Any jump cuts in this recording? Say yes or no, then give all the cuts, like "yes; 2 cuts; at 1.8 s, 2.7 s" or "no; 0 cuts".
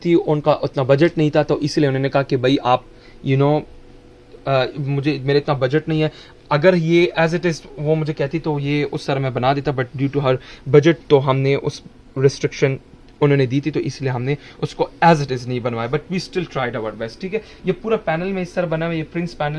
no; 0 cuts